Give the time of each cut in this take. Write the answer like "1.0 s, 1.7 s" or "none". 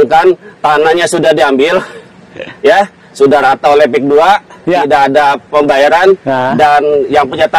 none

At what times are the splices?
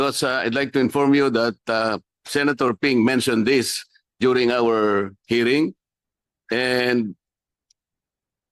none

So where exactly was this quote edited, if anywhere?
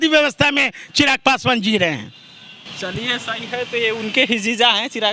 none

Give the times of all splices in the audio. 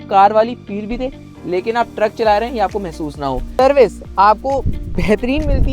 3.6 s

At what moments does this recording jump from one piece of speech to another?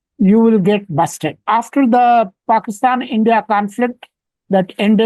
1.4 s

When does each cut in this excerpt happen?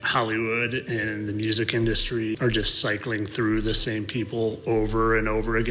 2.4 s

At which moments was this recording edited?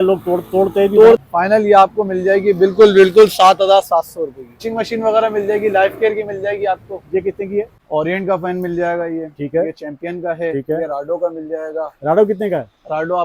1.3 s, 4.7 s, 7.8 s

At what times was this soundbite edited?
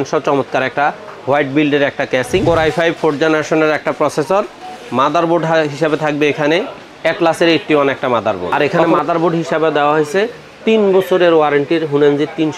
2.4 s, 8.5 s

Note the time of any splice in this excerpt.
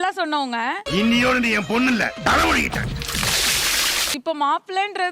none

